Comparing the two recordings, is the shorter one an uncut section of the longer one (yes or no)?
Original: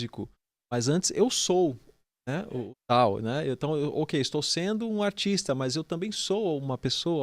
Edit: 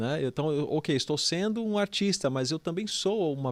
yes